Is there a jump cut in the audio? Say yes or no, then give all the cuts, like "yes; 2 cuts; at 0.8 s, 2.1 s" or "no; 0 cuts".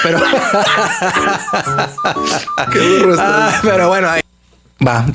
yes; 1 cut; at 4.2 s